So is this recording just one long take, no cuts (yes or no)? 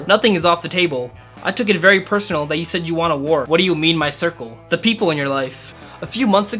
no